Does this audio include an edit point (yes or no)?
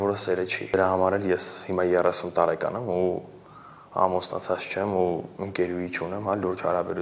yes